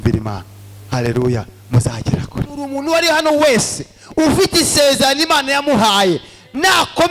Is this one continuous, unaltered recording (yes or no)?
no